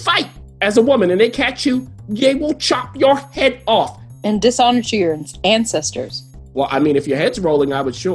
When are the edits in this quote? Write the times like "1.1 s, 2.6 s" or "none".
4.1 s